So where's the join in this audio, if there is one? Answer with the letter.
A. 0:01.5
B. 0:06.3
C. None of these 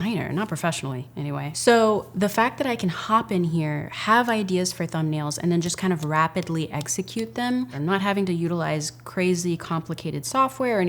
A